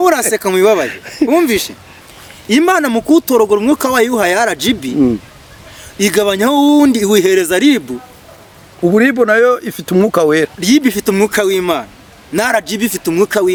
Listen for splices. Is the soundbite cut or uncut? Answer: uncut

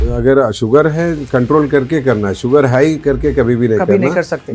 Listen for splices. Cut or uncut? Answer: uncut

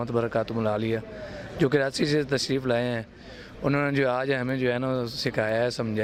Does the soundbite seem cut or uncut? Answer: uncut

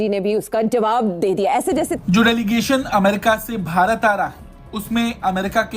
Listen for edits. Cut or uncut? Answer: cut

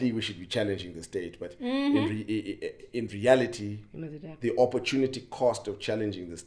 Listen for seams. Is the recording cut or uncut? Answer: uncut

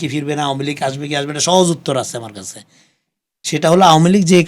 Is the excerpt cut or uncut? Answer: uncut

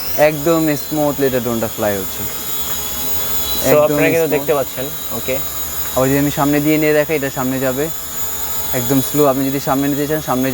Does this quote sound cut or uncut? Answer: uncut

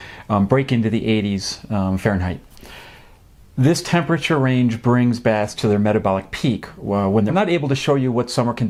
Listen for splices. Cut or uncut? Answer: uncut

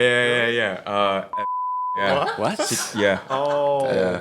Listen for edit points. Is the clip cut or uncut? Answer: cut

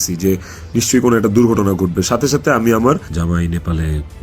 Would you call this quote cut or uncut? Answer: cut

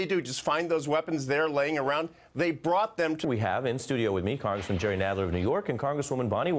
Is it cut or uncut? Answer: uncut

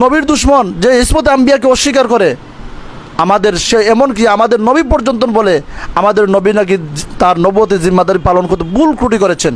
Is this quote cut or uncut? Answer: uncut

